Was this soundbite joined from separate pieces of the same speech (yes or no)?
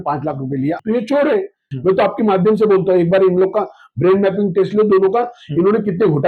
yes